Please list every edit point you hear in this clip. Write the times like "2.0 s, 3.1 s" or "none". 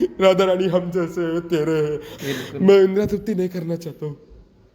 2.2 s